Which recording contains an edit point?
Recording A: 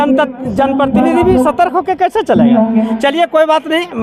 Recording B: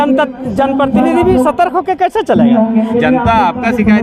B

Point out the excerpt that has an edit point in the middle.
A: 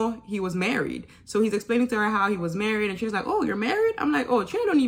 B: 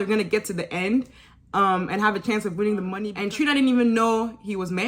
B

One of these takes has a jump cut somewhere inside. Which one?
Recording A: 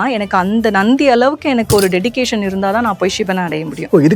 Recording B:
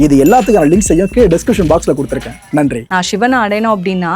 B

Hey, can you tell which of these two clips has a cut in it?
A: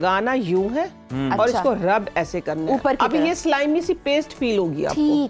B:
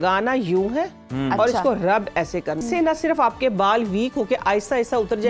B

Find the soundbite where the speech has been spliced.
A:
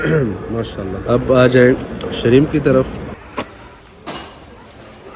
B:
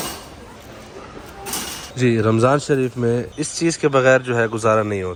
A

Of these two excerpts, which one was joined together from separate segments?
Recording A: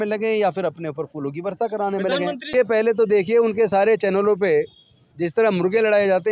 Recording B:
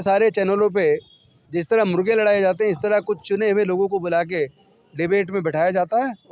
A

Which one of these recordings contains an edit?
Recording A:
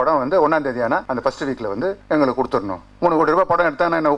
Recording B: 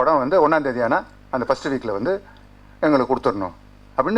A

